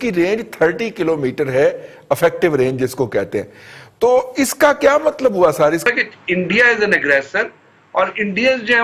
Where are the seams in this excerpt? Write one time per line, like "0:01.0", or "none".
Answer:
0:05.9